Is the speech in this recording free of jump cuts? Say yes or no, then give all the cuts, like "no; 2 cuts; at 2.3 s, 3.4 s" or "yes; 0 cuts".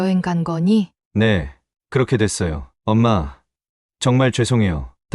no; 1 cut; at 1.0 s